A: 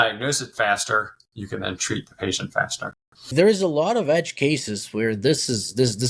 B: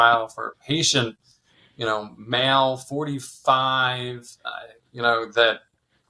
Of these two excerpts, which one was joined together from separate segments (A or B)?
A